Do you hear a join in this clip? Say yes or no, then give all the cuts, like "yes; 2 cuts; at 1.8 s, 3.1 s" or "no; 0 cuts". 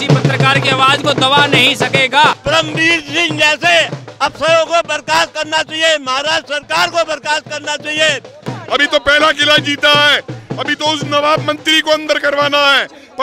yes; 2 cuts; at 2.4 s, 8.5 s